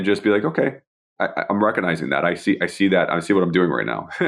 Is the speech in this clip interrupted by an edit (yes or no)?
no